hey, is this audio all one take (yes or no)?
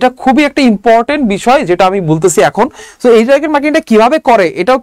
yes